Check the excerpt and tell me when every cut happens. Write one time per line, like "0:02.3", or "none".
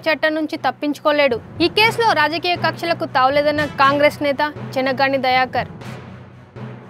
none